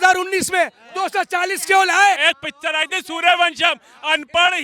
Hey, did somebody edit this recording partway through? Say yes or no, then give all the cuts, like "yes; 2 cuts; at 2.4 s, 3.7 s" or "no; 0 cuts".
yes; 1 cut; at 2.2 s